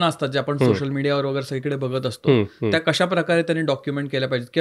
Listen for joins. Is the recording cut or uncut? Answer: uncut